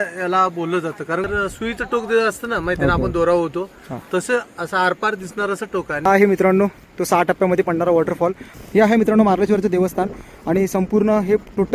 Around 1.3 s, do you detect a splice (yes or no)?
yes